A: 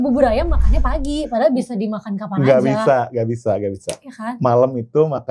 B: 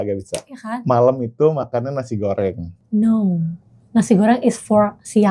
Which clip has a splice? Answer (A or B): B